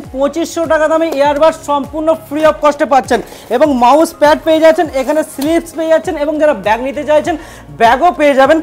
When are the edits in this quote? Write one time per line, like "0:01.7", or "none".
none